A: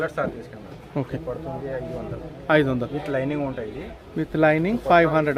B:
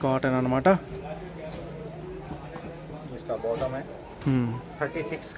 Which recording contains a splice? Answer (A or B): A